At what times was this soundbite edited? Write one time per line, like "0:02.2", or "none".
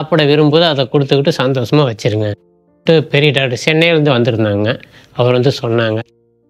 none